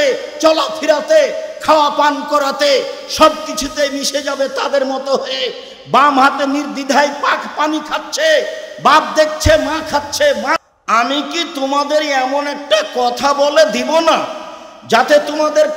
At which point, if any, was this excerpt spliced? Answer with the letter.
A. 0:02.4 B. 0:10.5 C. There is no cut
B